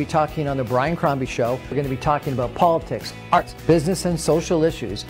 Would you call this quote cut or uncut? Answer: cut